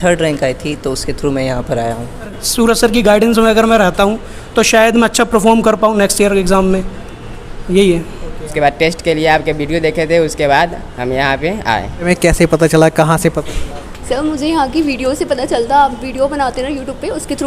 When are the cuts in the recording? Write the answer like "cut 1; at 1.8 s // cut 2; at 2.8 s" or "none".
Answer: cut 1; at 2.4 s // cut 2; at 8.4 s // cut 3; at 12.1 s